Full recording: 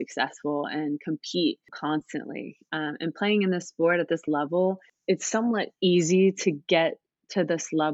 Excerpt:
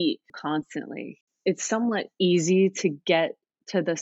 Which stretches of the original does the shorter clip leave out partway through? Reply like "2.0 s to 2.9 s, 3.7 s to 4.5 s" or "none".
2.7 s to 4.9 s